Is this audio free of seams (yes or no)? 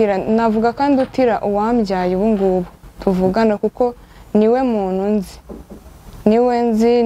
yes